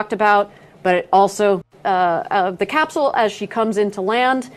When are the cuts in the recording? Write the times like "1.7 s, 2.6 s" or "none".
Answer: 1.7 s